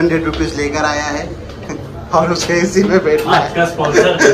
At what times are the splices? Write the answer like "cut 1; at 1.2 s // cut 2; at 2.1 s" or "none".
none